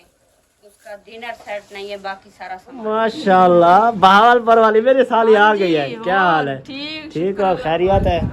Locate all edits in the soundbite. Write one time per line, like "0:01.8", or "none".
0:02.9